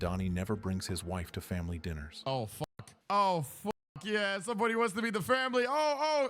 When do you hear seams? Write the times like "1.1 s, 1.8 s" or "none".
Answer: 2.6 s